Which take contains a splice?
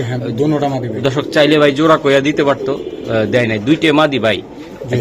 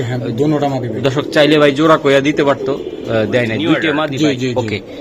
second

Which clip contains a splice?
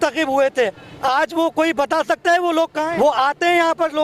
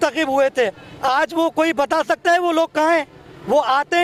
first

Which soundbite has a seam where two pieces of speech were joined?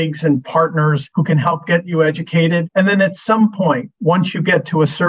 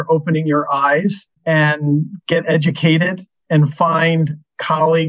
first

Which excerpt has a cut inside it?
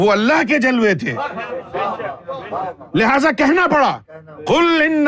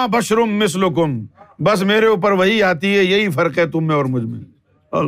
first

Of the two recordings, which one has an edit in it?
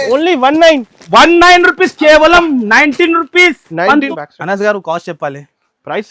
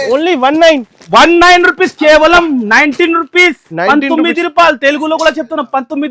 first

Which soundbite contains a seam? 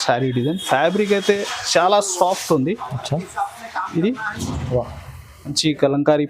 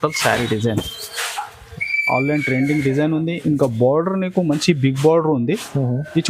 first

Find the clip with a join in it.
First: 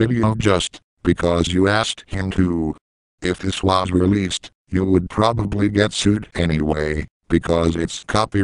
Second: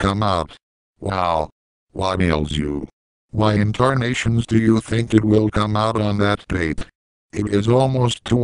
first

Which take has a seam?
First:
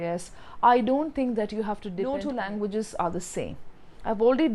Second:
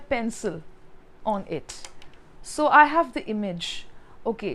first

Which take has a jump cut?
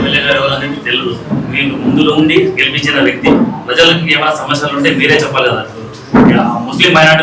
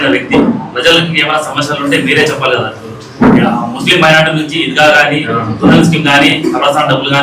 second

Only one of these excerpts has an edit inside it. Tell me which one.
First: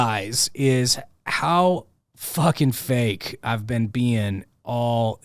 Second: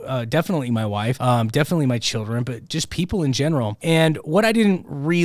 second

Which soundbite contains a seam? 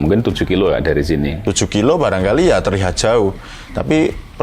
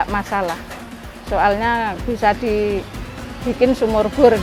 first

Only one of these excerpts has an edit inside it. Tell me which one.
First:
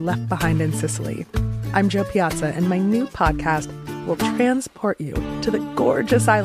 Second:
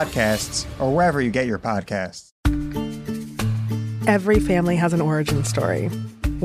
second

